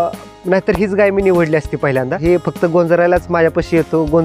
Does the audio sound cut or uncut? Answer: cut